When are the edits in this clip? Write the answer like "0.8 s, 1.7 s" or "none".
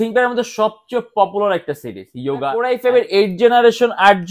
2.6 s